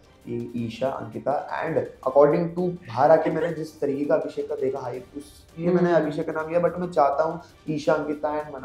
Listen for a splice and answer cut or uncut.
uncut